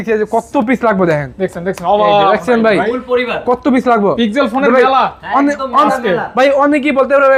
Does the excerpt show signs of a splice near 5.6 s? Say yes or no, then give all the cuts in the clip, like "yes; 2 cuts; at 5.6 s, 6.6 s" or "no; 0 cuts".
no; 0 cuts